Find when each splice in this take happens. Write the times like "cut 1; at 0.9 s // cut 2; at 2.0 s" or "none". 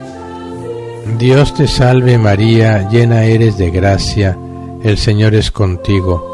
cut 1; at 1.1 s